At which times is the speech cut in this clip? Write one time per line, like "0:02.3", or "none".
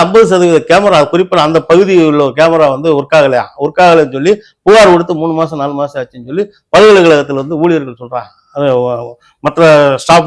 none